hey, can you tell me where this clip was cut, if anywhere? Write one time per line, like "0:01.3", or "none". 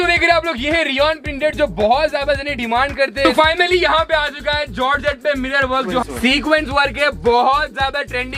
0:03.2
0:05.8